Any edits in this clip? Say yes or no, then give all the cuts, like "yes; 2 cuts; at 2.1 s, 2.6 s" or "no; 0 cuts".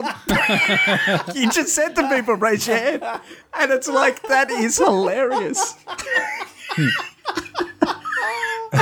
no; 0 cuts